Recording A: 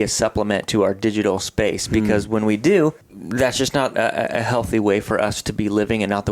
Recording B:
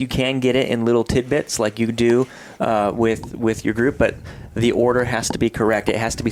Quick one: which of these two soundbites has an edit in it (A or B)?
A